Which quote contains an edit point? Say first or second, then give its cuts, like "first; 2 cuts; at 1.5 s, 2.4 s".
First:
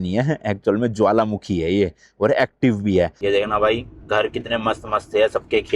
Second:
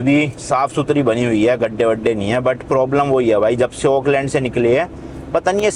first; 1 cut; at 3.2 s